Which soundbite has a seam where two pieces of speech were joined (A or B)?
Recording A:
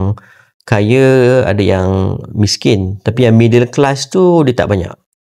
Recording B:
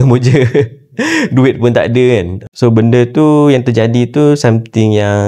B